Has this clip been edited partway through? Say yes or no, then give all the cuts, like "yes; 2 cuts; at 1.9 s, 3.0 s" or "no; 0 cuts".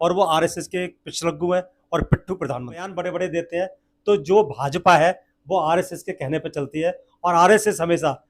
yes; 1 cut; at 3.0 s